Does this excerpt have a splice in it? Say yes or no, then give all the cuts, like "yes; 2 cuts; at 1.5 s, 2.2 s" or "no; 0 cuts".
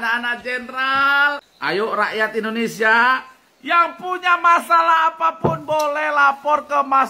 yes; 1 cut; at 1.5 s